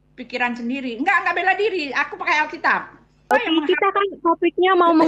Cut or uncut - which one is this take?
cut